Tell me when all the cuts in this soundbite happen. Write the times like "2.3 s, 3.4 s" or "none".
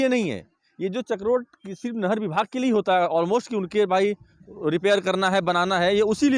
none

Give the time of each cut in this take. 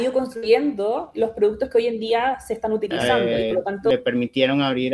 3.0 s

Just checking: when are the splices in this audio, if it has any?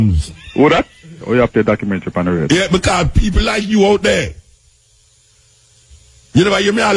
1.2 s

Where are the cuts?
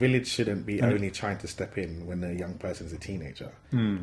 none

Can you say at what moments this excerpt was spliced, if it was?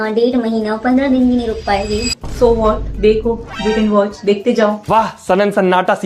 none

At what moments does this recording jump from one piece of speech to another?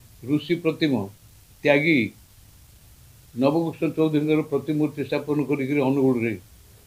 none

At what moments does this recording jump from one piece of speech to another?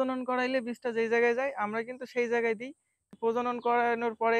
3.1 s

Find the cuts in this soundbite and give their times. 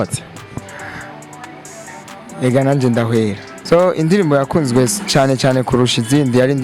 3.5 s

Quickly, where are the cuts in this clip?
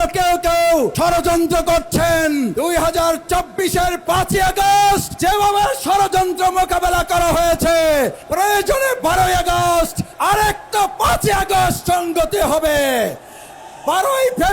0.9 s, 2.5 s, 5.1 s, 8.2 s, 10.1 s

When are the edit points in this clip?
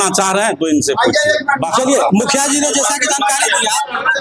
none

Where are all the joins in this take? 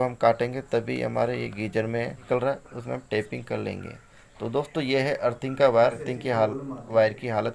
2.2 s, 6.1 s

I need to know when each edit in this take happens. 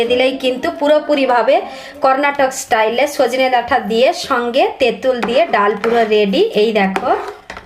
none

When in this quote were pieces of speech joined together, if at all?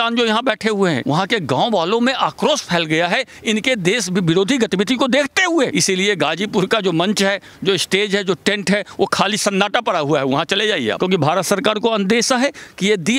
1.0 s, 5.7 s, 11.0 s

